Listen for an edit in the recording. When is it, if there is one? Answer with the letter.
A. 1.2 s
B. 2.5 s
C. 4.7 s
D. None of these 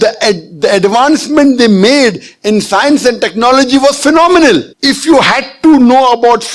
C